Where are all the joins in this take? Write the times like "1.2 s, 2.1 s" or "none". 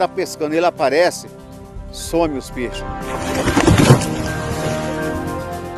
none

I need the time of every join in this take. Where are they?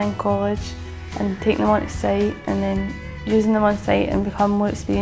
none

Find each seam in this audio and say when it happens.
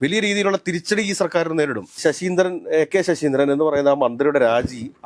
1.9 s

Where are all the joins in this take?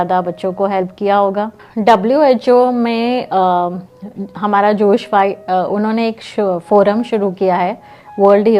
1.6 s

